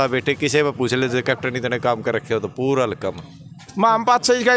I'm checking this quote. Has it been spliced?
yes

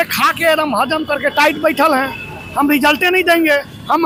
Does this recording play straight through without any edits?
yes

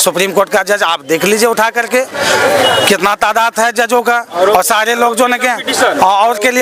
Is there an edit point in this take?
no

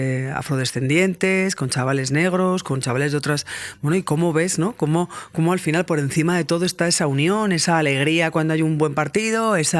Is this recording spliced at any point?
no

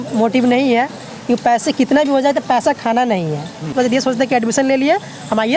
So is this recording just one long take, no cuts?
no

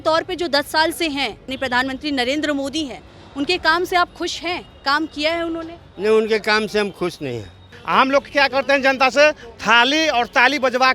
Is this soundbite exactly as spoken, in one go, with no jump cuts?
no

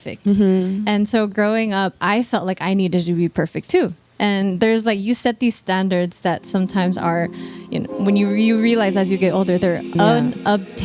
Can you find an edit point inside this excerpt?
yes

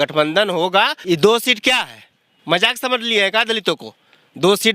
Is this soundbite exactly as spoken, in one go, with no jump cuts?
no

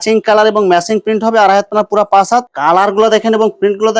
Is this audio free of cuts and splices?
no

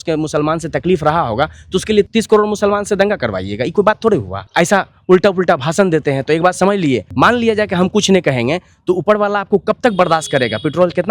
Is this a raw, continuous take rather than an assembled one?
no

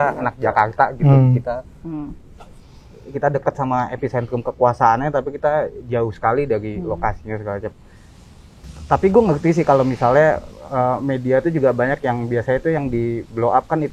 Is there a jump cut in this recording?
no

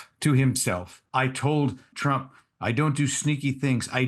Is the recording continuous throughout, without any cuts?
no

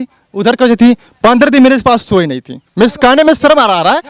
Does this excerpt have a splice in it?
no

